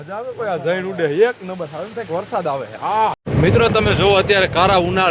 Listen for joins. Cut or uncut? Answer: cut